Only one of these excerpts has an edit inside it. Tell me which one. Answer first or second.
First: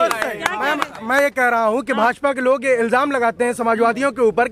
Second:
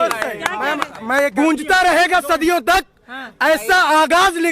second